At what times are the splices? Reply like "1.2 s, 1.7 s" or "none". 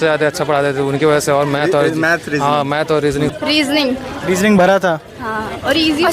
3.3 s